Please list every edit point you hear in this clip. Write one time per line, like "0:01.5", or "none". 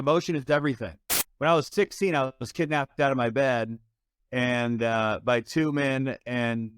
0:01.1